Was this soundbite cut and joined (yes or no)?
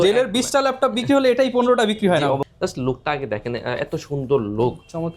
yes